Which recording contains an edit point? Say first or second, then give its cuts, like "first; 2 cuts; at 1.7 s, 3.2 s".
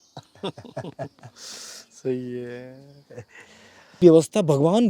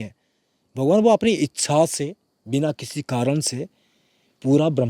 first; 1 cut; at 4.0 s